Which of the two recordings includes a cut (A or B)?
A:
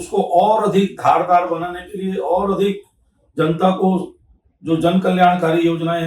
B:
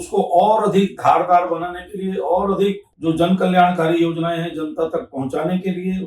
B